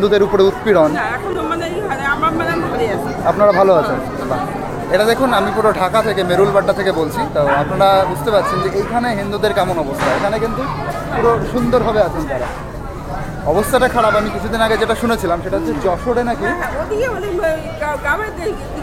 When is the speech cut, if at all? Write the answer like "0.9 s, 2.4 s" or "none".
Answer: none